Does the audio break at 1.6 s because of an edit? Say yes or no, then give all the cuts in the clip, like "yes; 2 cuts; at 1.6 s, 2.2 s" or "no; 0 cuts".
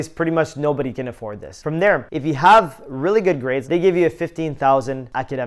yes; 2 cuts; at 1.6 s, 3.6 s